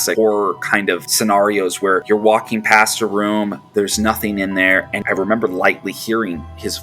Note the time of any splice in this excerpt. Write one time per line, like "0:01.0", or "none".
0:01.1
0:02.0
0:04.9